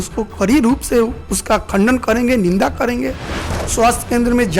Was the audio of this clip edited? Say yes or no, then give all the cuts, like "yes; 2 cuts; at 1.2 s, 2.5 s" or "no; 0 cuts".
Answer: yes; 1 cut; at 3.5 s